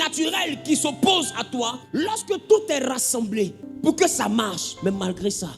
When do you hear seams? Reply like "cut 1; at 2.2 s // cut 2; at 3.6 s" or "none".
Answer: cut 1; at 1.8 s // cut 2; at 3.6 s